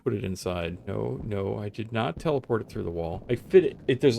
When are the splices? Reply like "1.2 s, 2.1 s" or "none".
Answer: 0.8 s, 3.2 s